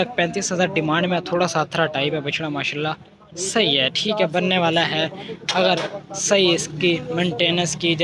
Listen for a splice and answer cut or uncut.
uncut